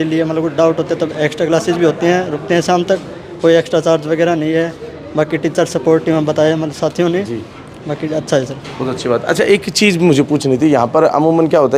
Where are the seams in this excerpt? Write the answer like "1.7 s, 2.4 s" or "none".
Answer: none